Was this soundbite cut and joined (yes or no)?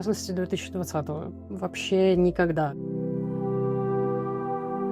yes